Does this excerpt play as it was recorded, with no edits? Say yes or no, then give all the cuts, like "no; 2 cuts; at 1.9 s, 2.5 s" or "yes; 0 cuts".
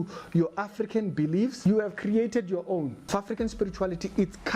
no; 2 cuts; at 1.6 s, 3.1 s